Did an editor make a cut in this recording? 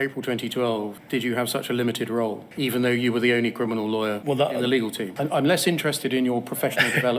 yes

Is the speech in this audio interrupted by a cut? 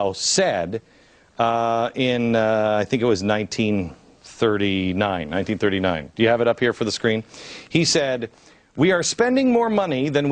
no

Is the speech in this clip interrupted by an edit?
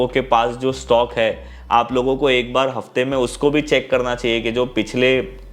no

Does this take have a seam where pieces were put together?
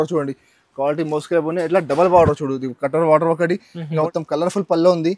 yes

